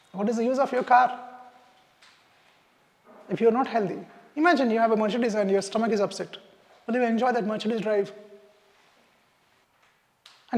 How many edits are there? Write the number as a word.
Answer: one